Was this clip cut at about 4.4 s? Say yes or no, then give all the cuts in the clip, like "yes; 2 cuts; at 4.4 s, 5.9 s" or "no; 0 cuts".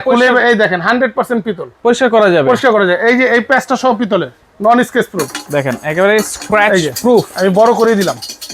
yes; 1 cut; at 4.4 s